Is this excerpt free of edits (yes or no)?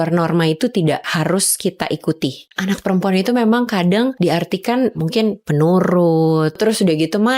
no